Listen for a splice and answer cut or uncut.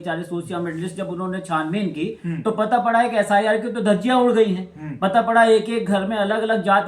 uncut